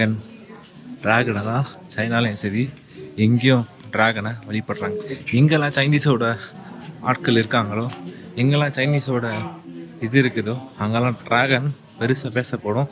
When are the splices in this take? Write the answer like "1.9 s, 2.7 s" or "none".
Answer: none